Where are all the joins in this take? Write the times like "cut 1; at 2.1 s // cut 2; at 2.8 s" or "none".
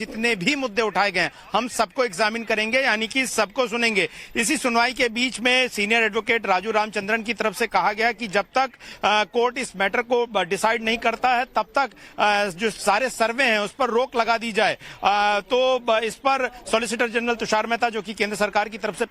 none